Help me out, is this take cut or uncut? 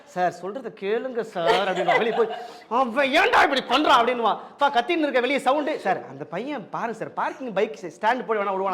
uncut